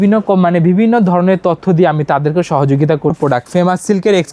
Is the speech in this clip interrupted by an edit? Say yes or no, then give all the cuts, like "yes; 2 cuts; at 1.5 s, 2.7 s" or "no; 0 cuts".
yes; 1 cut; at 3.2 s